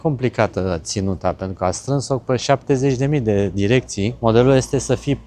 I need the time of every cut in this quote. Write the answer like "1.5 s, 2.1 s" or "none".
4.1 s